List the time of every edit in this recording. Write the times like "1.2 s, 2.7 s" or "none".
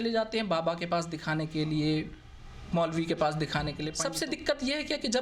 3.9 s